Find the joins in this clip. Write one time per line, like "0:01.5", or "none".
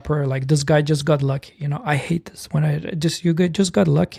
none